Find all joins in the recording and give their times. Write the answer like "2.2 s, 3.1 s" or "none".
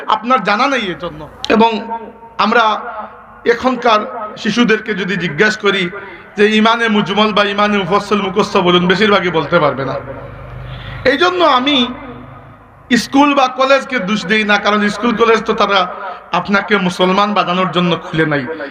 1.0 s